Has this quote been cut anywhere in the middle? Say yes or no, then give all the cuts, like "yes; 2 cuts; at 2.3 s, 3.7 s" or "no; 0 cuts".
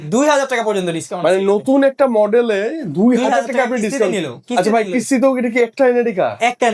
no; 0 cuts